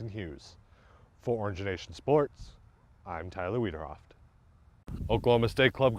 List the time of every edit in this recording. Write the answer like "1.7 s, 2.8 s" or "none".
4.9 s